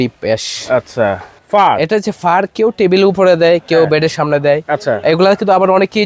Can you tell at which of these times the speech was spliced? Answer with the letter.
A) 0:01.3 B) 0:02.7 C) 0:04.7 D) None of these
A